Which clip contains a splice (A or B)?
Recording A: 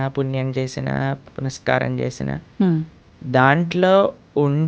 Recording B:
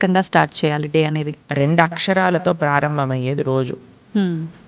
B